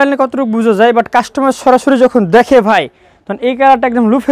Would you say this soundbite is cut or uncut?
uncut